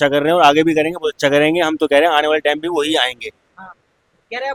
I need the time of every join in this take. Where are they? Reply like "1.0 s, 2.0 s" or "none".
none